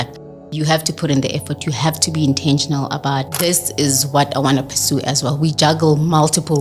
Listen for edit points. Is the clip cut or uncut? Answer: cut